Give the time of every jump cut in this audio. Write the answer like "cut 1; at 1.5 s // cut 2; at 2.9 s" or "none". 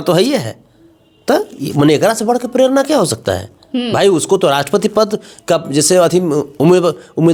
none